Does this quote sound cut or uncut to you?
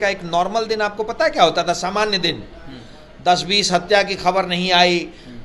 uncut